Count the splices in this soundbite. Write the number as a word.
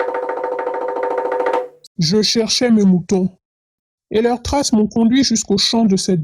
two